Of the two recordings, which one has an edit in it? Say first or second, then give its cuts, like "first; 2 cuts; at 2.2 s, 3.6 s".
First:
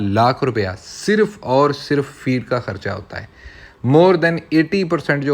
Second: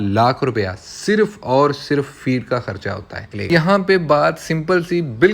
second; 1 cut; at 3.3 s